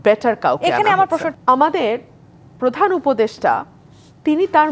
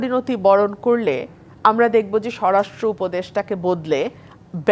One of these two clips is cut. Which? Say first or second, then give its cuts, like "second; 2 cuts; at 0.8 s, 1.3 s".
first; 1 cut; at 1.3 s